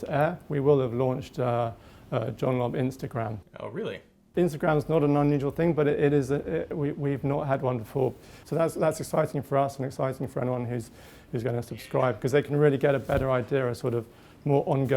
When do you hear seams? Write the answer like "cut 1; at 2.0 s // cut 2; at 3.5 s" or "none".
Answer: cut 1; at 4.3 s // cut 2; at 8.3 s